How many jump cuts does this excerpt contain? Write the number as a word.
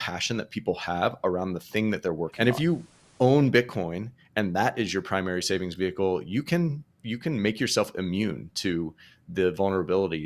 one